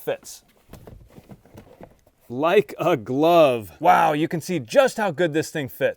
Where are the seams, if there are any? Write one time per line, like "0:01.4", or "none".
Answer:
0:01.1
0:02.1

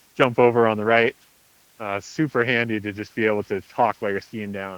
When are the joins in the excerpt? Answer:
none

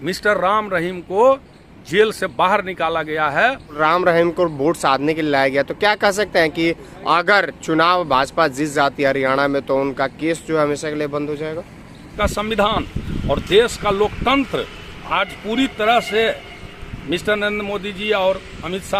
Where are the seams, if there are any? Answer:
0:03.8
0:12.1

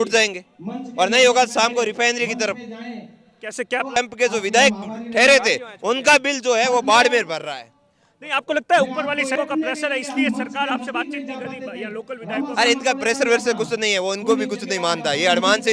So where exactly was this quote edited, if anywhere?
0:04.0
0:09.4

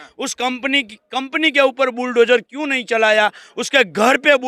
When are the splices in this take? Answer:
none

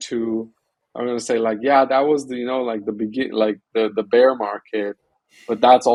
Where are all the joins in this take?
none

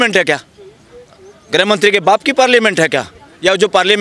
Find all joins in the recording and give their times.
none

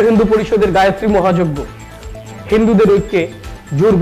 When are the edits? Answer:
none

